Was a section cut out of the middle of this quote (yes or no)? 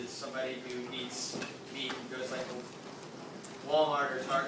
no